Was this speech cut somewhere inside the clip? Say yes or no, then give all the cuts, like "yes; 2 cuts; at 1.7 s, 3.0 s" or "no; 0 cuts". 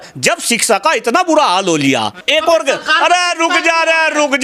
yes; 1 cut; at 2.2 s